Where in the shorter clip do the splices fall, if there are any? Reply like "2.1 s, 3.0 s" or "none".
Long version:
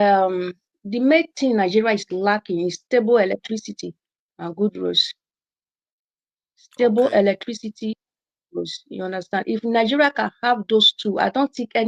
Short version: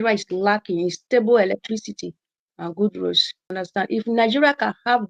3.5 s